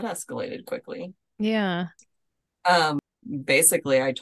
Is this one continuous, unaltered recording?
no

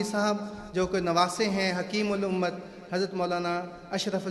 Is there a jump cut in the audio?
no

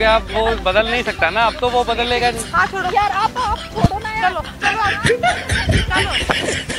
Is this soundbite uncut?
yes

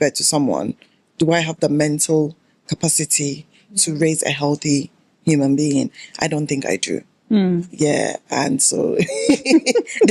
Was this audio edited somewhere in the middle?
no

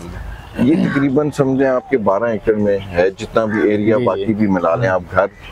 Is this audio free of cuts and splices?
yes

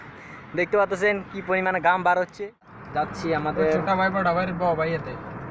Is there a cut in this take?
yes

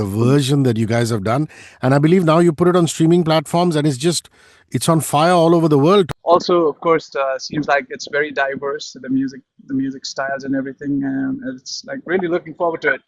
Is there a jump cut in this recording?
yes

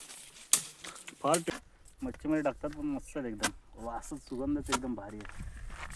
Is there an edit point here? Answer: yes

